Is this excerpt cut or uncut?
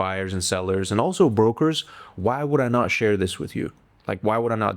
uncut